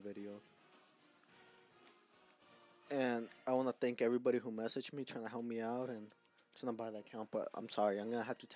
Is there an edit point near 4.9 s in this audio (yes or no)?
yes